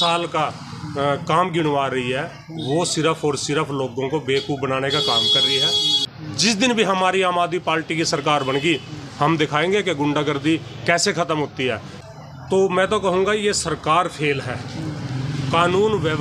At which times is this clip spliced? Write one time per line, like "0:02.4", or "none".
0:06.0
0:11.9